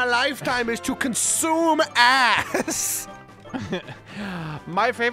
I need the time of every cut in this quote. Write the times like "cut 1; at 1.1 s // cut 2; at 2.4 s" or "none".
none